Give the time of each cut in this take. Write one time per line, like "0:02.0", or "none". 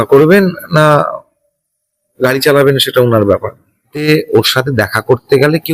0:04.0